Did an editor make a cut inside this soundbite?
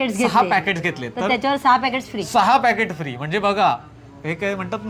no; 0 cuts

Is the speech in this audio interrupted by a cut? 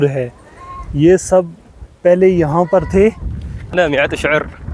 yes; 1 cut; at 3.7 s

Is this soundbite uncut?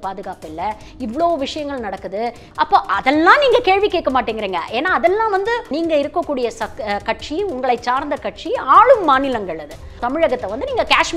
no; 4 cuts; at 0.9 s, 2.4 s, 5.8 s, 10.0 s

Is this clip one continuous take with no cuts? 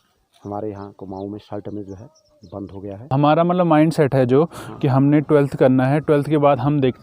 no; 1 cut; at 3.1 s

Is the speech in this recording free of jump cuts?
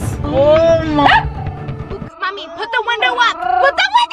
yes; 0 cuts

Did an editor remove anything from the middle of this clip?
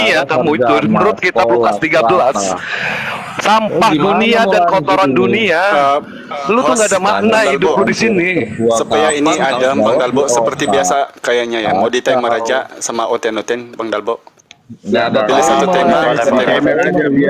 no; 0 cuts

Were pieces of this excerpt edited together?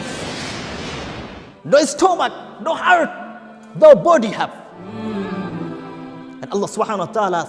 no; 0 cuts

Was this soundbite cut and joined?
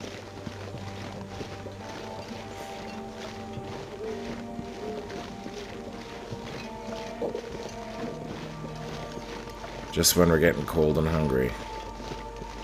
no; 0 cuts

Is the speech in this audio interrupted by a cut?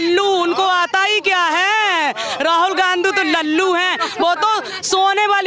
no; 0 cuts

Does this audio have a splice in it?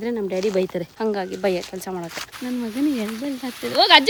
no; 0 cuts

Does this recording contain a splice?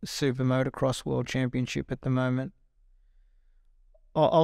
no; 0 cuts

